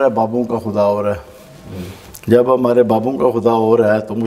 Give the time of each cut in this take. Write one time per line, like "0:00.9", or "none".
none